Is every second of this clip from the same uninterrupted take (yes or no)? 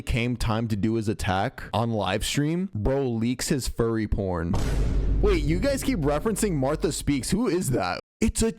no